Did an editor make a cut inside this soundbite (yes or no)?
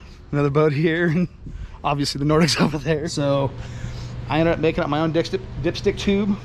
yes